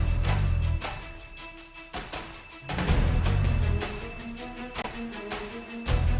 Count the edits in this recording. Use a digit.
0